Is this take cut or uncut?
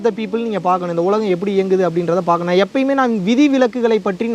uncut